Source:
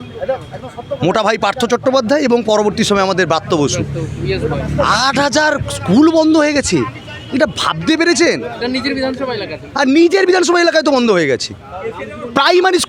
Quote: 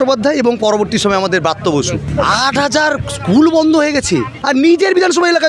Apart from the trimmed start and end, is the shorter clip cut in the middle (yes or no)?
yes